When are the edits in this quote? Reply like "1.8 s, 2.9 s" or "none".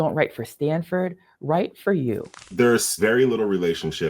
2.8 s